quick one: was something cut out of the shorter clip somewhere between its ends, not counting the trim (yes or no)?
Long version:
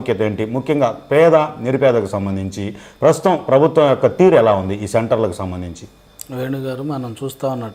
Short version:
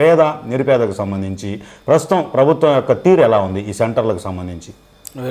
no